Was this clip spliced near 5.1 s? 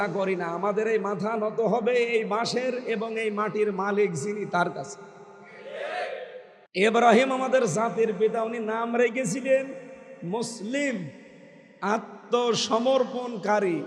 no; 1 cut; at 6.5 s

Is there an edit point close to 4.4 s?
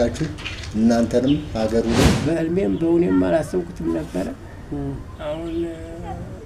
no; 1 cut; at 2.1 s

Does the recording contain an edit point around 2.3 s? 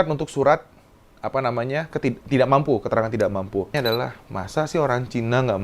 no; 1 cut; at 3.8 s

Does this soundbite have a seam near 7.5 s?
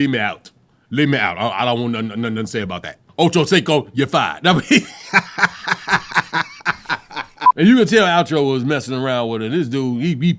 yes; 1 cut; at 7.5 s

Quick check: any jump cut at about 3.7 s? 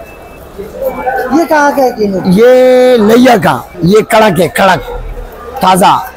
yes; 1 cut; at 3.7 s

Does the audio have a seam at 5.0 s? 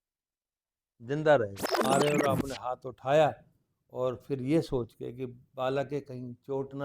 no; 1 cut; at 1.7 s

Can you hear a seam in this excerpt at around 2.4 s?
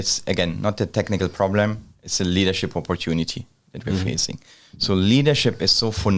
no; 0 cuts

